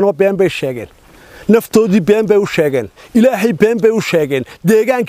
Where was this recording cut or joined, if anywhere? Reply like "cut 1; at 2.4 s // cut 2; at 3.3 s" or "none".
none